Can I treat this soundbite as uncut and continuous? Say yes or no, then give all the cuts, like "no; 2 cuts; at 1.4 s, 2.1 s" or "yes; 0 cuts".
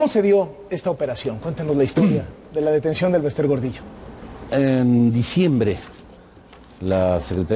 yes; 0 cuts